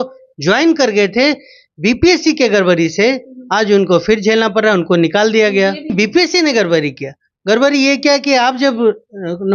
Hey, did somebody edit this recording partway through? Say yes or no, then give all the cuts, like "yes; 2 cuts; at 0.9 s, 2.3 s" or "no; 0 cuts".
yes; 1 cut; at 5.9 s